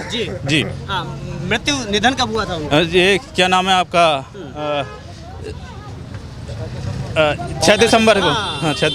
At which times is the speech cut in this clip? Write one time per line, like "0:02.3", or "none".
none